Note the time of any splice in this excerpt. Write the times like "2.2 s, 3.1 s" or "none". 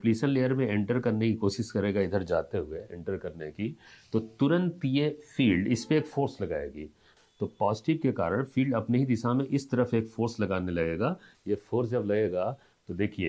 7.1 s, 11.3 s